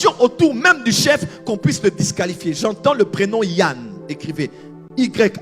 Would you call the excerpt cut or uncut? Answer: uncut